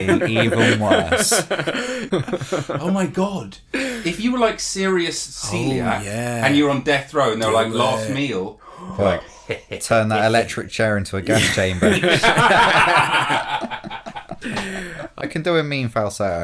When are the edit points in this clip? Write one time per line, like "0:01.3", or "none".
0:02.1
0:15.2